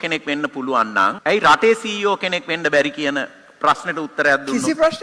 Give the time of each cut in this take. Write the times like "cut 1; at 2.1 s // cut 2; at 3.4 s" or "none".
cut 1; at 1.2 s